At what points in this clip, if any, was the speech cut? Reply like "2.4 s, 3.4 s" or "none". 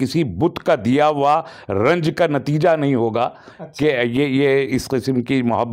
none

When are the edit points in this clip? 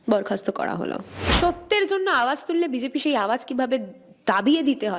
1.3 s

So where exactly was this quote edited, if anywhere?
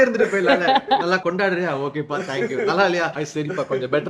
1.2 s, 3.2 s

